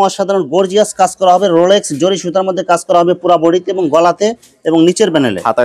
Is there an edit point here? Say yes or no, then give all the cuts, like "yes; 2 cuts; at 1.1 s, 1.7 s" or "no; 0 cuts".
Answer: no; 0 cuts